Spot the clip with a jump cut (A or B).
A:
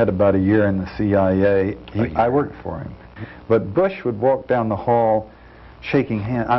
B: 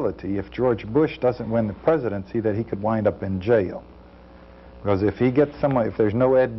A